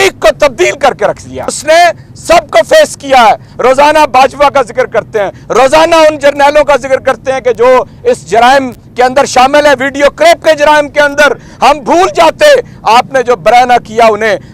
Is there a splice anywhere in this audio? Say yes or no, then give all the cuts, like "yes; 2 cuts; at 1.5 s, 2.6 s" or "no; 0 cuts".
yes; 1 cut; at 1.6 s